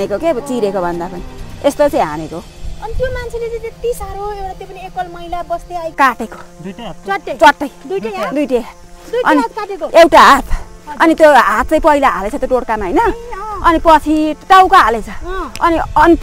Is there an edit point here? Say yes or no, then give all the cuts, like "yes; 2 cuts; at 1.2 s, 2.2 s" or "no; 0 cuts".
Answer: yes; 1 cut; at 6.0 s